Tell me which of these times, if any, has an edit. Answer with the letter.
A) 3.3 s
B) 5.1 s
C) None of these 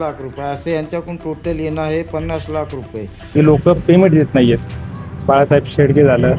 A